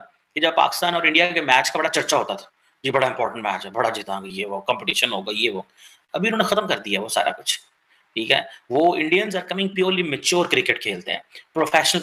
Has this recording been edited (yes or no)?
no